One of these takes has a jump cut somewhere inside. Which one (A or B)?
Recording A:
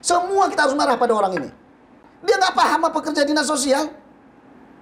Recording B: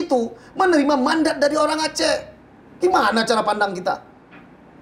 A